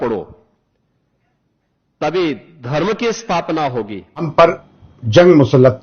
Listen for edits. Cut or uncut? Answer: cut